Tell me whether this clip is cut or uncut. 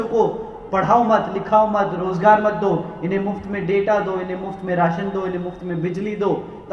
uncut